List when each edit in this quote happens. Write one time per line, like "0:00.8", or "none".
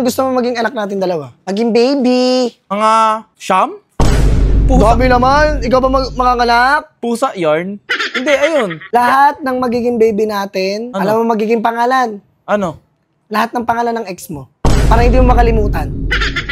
0:01.3
0:02.8
0:08.9
0:10.9